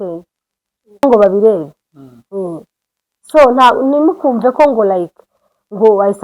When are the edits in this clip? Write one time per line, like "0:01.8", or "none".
0:01.0

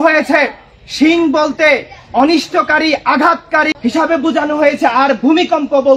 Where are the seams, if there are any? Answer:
0:03.8

